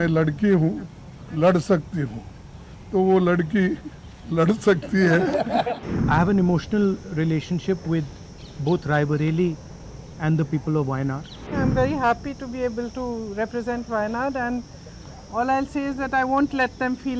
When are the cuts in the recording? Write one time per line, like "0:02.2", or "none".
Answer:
0:05.8
0:11.5